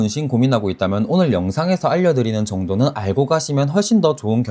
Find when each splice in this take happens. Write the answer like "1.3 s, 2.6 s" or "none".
none

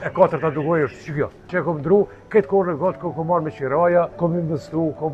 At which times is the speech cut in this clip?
1.5 s, 4.1 s

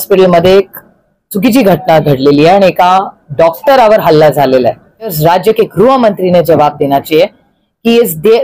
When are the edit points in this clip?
5.2 s

